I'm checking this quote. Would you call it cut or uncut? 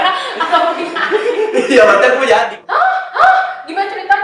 cut